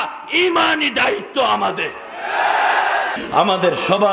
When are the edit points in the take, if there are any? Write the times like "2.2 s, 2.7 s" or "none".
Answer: 3.2 s